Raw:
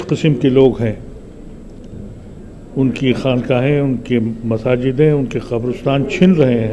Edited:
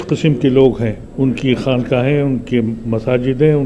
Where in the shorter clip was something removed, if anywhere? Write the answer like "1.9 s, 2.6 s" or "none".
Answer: 1.0 s